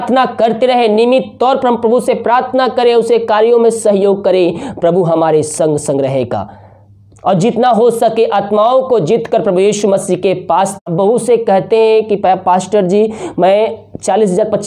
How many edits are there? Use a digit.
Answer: 1